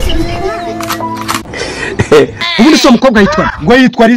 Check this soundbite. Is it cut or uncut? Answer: cut